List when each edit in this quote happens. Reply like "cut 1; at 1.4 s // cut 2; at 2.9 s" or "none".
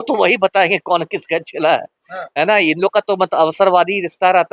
none